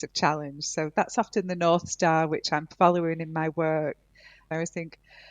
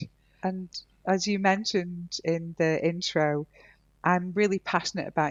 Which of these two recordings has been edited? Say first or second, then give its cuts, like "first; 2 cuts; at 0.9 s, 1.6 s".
first; 1 cut; at 4.4 s